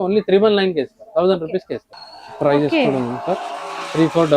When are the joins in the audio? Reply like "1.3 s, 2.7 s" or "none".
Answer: 1.8 s

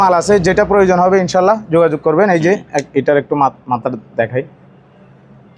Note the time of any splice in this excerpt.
none

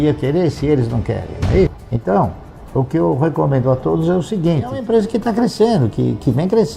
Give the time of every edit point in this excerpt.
1.9 s, 4.8 s

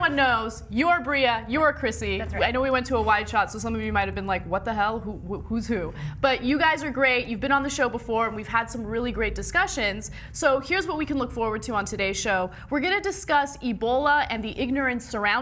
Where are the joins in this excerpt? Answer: 4.9 s

